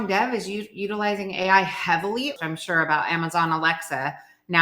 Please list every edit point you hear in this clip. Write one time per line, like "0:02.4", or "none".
0:02.4